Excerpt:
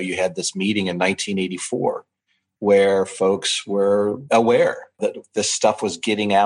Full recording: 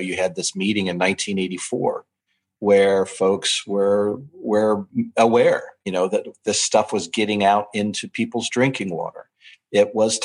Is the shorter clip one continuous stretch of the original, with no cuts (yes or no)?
no